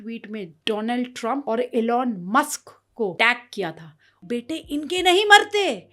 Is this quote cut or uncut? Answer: cut